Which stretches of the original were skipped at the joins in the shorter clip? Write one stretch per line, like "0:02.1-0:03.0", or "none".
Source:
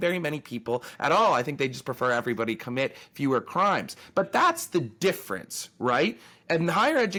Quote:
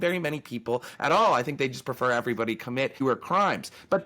0:03.0-0:03.3